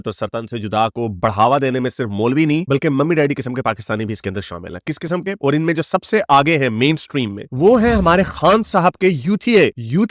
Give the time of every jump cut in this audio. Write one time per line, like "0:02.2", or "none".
none